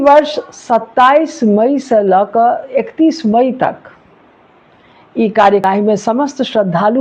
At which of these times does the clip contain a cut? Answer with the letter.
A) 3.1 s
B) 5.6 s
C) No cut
B